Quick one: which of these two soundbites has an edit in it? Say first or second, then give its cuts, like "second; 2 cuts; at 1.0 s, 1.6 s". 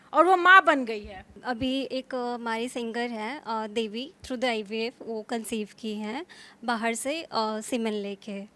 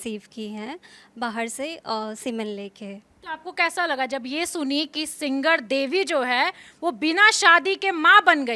first; 2 cuts; at 1.3 s, 4.2 s